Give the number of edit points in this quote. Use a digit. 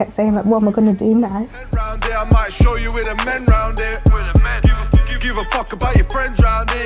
1